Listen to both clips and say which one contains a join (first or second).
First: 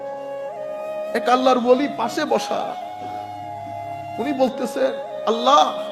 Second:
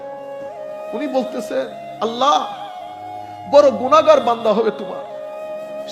second